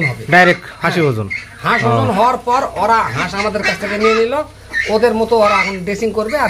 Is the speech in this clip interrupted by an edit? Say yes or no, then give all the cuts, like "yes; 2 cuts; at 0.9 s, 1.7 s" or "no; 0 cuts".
no; 0 cuts